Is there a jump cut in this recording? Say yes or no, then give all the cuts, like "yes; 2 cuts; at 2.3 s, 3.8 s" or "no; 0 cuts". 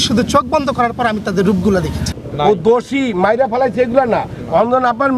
yes; 1 cut; at 2.2 s